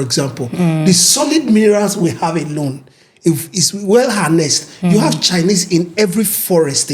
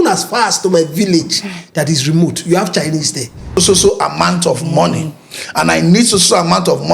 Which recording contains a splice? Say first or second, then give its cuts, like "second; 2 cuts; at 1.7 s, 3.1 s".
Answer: second; 1 cut; at 3.5 s